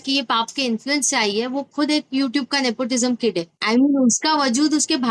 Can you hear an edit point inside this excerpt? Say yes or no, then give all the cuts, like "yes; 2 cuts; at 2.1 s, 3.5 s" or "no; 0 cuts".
yes; 1 cut; at 3.5 s